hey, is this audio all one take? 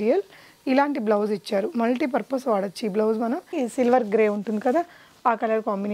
no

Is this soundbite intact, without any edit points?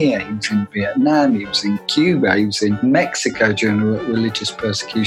no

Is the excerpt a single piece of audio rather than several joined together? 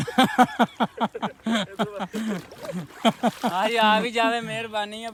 yes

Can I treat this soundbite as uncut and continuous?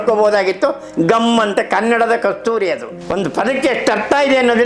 no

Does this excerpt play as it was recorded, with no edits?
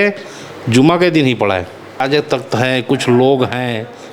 no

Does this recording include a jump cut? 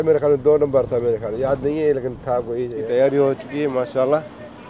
yes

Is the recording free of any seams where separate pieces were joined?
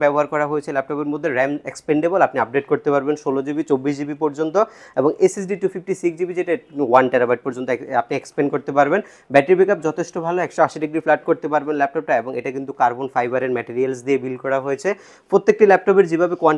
yes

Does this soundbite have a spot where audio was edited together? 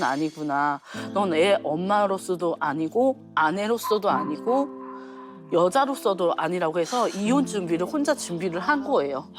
no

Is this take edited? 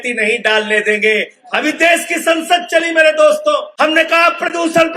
yes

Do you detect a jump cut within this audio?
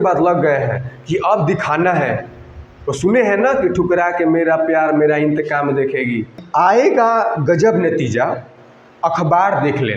yes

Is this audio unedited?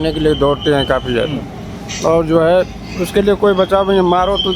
yes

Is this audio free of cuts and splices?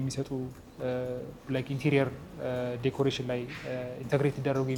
yes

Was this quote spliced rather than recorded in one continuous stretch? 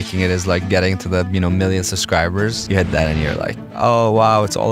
yes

